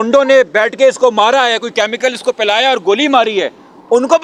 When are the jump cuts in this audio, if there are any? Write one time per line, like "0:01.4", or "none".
none

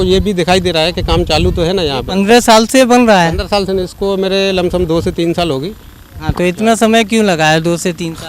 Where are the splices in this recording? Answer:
none

